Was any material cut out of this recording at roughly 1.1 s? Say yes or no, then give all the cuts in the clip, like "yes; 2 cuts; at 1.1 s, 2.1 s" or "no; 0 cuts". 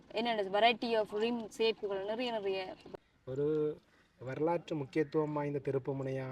no; 1 cut; at 2.8 s